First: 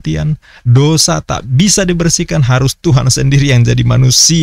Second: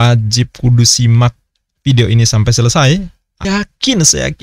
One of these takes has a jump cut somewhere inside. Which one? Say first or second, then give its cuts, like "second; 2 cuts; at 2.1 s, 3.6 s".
second; 1 cut; at 3.4 s